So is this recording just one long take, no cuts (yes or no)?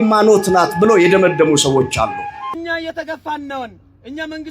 no